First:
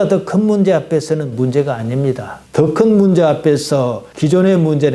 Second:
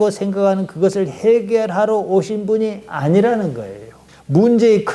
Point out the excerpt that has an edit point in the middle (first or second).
first